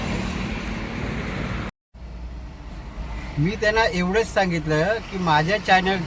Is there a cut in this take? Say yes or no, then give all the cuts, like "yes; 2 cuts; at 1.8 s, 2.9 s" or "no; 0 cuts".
yes; 1 cut; at 1.8 s